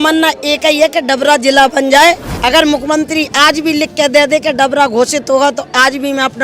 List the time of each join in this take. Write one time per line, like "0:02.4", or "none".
0:02.3